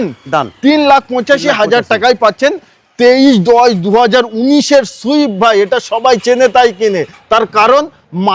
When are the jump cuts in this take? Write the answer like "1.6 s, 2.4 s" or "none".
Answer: none